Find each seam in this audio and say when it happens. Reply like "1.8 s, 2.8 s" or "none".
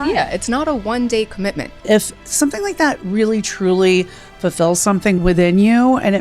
1.8 s, 5.2 s